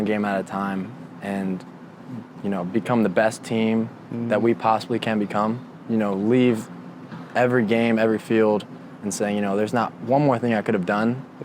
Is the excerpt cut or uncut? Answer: cut